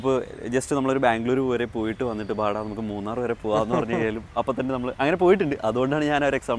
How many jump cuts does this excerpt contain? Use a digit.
0